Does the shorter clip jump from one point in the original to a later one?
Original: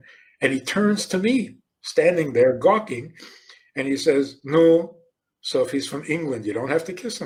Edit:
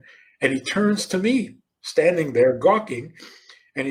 no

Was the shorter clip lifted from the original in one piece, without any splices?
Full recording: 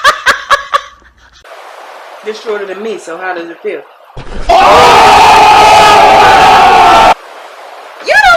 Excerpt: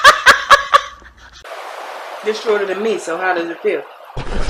yes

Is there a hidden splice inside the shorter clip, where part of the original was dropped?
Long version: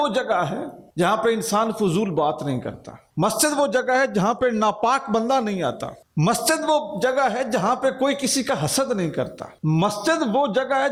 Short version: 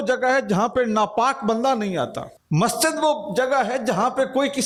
no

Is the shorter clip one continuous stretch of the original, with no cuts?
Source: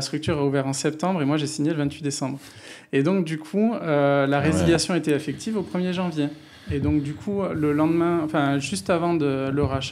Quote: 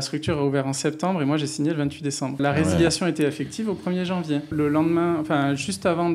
no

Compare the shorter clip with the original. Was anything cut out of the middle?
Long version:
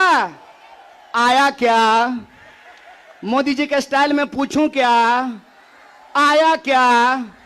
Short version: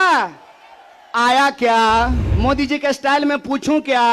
yes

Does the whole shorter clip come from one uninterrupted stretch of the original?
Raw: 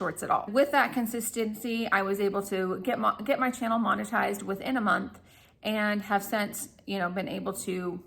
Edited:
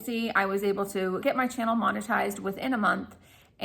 no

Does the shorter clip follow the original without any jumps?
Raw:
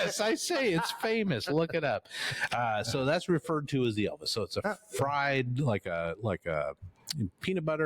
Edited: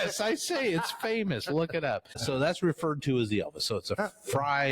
no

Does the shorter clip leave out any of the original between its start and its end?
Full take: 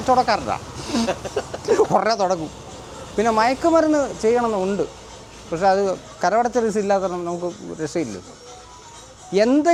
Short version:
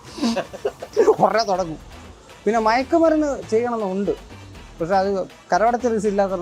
no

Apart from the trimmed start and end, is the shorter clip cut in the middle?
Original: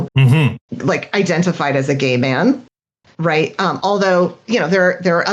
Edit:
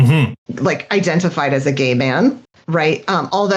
yes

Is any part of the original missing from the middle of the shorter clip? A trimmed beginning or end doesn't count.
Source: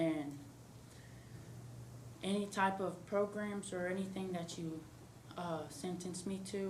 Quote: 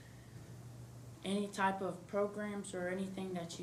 no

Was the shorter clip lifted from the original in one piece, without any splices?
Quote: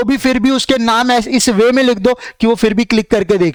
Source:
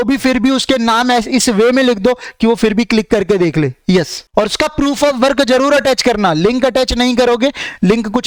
yes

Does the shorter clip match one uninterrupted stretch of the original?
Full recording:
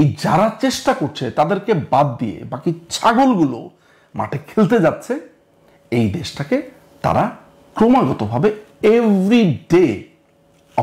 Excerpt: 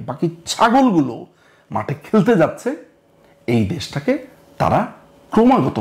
yes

